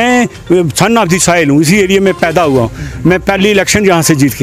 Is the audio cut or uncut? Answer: uncut